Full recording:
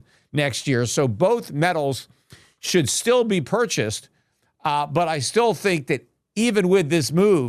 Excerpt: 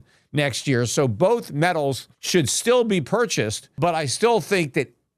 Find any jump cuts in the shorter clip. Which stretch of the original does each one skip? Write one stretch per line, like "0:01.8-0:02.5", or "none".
0:02.1-0:02.5
0:04.1-0:04.9